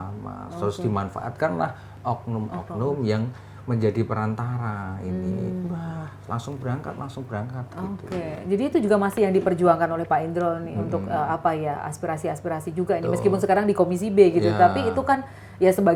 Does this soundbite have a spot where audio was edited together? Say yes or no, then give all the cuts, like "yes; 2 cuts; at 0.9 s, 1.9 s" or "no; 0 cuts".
no; 0 cuts